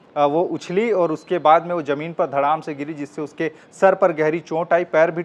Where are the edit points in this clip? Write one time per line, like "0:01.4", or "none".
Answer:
none